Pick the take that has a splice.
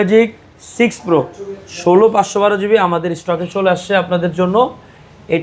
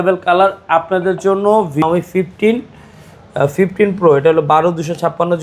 second; 1 cut; at 1.8 s

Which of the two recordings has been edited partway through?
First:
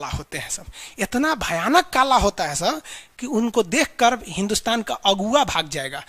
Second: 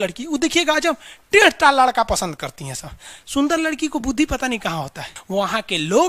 second; 1 cut; at 5.1 s

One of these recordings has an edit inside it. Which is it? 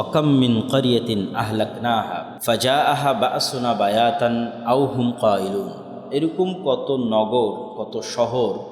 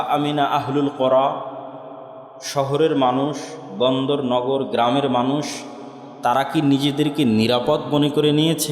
first; 1 cut; at 2.3 s

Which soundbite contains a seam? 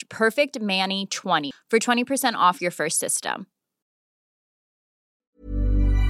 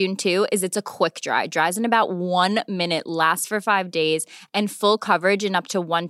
first; 1 cut; at 1.5 s

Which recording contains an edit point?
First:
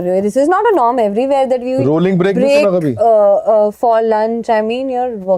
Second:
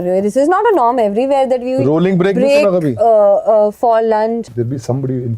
second; 1 cut; at 4.4 s

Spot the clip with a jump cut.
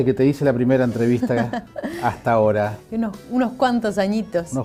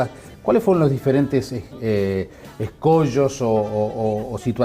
second; 1 cut; at 2.8 s

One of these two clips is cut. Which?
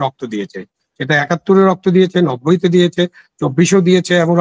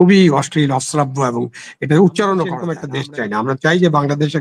second; 1 cut; at 2.9 s

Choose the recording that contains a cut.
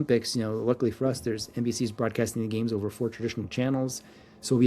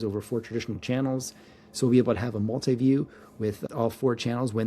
second; 1 cut; at 3.6 s

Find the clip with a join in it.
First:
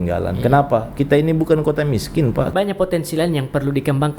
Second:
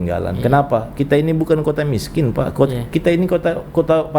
first; 1 cut; at 2.5 s

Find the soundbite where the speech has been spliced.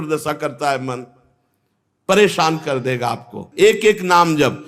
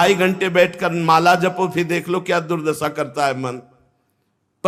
first; 1 cut; at 3.4 s

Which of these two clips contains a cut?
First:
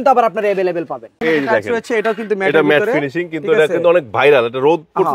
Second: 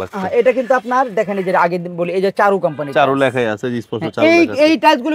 first; 1 cut; at 1.1 s

